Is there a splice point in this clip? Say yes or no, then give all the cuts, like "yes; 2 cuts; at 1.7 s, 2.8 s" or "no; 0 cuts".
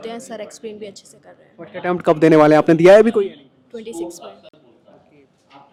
no; 0 cuts